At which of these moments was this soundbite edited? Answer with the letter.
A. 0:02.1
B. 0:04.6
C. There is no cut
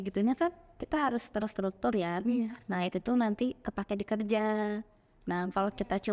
C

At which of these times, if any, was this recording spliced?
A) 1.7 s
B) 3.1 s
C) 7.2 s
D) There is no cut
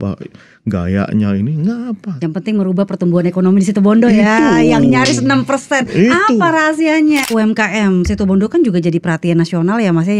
C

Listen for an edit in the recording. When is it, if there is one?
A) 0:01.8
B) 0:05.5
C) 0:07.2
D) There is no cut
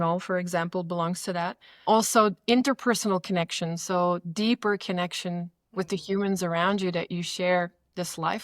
A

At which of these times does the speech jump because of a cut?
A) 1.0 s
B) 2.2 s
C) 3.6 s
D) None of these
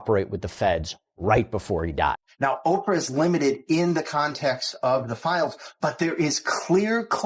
B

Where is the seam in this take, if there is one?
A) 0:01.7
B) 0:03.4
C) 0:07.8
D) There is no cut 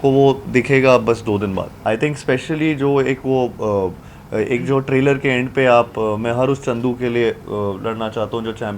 A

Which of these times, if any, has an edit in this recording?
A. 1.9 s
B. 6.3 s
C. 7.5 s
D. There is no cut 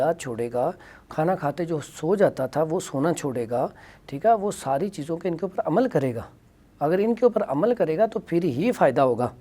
D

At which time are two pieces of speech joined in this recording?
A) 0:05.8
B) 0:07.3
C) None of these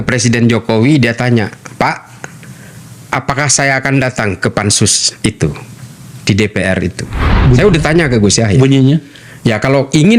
B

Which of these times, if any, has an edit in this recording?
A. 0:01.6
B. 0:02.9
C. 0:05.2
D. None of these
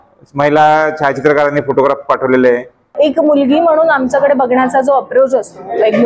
B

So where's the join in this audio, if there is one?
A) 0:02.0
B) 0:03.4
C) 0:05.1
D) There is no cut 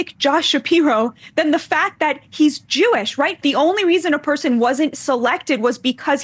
B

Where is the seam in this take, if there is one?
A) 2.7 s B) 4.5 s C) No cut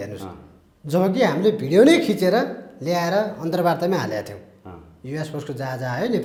C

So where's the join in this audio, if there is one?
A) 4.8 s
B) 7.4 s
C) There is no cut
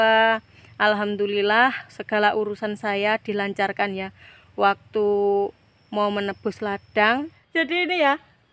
B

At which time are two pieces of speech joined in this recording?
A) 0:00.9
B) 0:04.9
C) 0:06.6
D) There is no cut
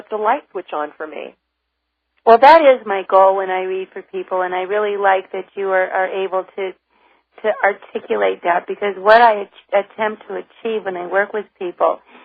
B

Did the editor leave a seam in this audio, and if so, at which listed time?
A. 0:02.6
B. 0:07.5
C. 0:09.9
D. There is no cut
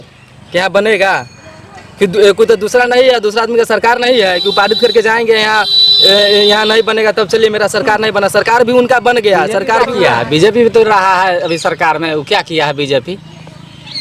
C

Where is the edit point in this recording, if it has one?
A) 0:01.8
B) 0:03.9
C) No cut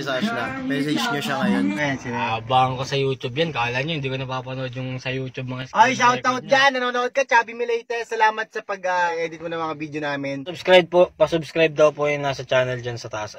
A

